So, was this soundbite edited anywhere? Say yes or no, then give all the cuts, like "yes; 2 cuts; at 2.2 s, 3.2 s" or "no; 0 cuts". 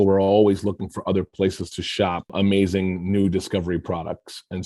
yes; 1 cut; at 2.3 s